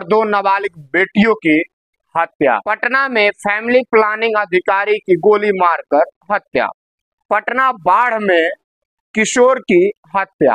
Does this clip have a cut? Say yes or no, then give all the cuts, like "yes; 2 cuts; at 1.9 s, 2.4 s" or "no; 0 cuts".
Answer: yes; 1 cut; at 2.7 s